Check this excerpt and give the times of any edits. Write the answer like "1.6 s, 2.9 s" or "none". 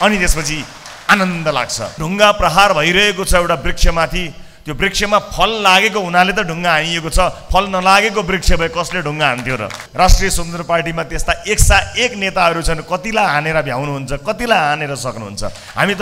2.0 s, 9.8 s